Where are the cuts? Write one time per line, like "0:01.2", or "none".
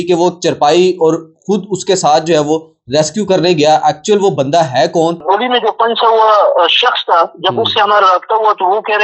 0:05.2